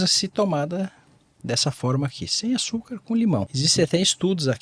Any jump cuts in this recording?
yes; 1 cut; at 3.3 s

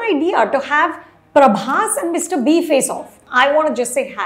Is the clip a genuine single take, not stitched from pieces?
no; 1 cut; at 3.2 s

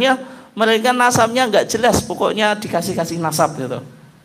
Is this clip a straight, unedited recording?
yes; 0 cuts

